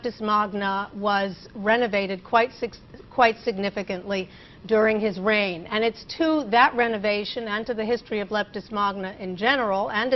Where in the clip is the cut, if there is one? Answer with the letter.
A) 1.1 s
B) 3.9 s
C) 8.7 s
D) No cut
D